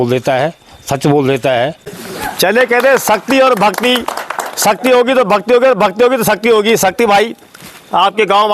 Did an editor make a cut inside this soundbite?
yes; 1 cut; at 1.4 s

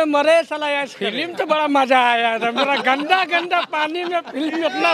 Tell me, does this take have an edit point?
yes; 1 cut; at 1.2 s

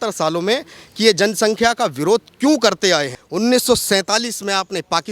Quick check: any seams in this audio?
yes; 1 cut; at 3.1 s

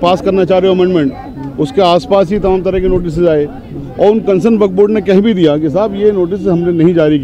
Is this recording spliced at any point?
no; 0 cuts

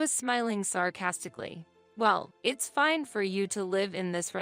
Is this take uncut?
no; 1 cut; at 1.8 s

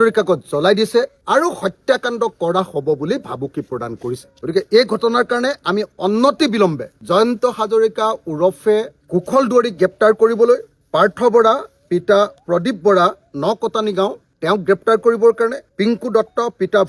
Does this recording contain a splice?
yes; 2 cuts; at 1.2 s, 4.3 s

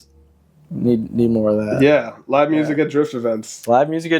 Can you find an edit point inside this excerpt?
no; 0 cuts

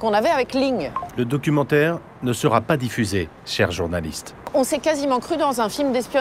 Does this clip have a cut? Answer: yes; 3 cuts; at 1.0 s, 3.4 s, 4.5 s

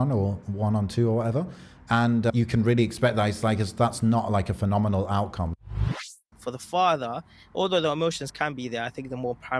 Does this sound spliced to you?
yes; 2 cuts; at 2.3 s, 6.1 s

